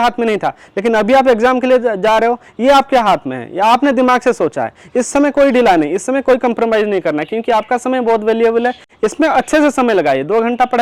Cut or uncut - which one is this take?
uncut